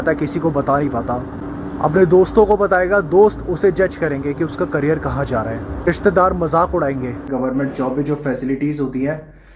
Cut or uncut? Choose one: cut